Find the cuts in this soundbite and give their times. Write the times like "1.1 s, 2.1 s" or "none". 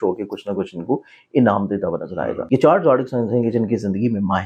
2.4 s